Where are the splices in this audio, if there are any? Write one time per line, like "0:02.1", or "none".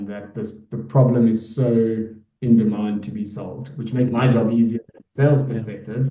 none